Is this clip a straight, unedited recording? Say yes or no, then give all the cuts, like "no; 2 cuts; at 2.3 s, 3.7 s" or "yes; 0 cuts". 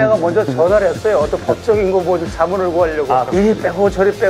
no; 1 cut; at 3.3 s